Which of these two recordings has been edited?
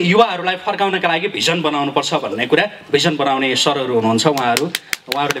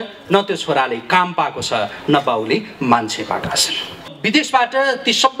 second; 1 cut; at 4.1 s

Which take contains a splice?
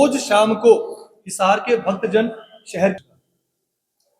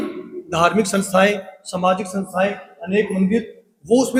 first; 1 cut; at 3.0 s

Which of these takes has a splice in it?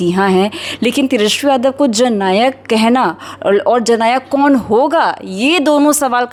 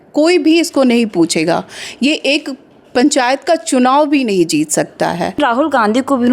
second; 1 cut; at 5.4 s

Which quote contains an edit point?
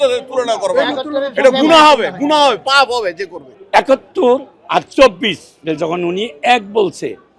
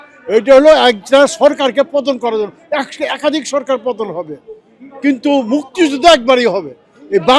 first; 1 cut; at 3.3 s

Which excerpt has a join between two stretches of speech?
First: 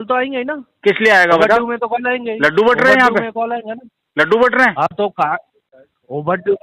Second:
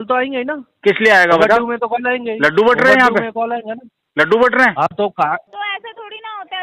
second; 1 cut; at 5.5 s

